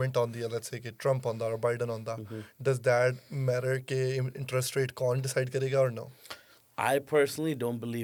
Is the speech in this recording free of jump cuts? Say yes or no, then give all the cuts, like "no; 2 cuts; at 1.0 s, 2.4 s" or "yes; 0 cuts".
yes; 0 cuts